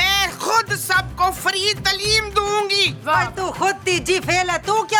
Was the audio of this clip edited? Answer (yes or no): no